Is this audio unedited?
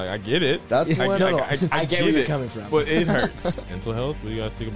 no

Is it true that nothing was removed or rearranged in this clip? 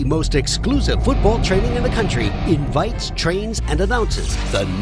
yes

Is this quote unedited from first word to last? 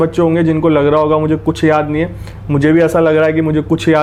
yes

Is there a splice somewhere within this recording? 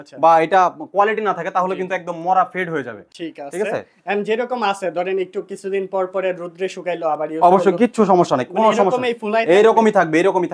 no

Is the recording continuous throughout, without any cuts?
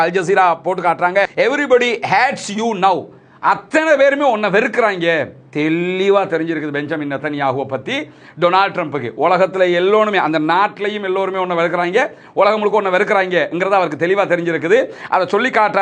yes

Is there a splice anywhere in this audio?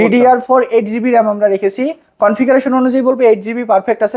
no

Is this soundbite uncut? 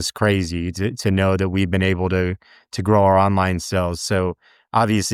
yes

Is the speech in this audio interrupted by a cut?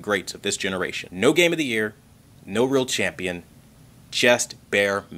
yes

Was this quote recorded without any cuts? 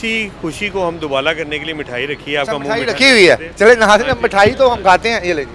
yes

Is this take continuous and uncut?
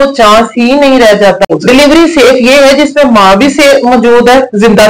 no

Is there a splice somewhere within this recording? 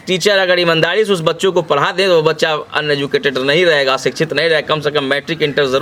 no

